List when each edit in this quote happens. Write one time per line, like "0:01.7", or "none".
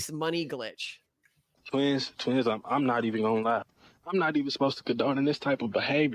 0:01.5